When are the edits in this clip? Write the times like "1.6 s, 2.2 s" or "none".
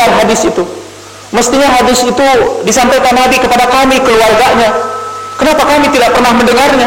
none